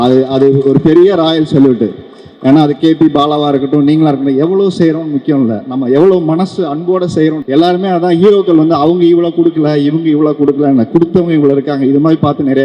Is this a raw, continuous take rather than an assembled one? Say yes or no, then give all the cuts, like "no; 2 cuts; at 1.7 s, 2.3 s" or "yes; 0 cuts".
no; 1 cut; at 7.4 s